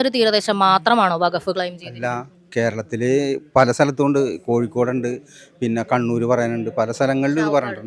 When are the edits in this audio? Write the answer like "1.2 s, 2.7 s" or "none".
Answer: none